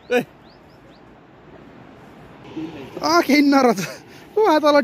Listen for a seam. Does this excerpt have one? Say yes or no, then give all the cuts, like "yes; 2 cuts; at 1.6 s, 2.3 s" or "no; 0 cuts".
yes; 1 cut; at 2.4 s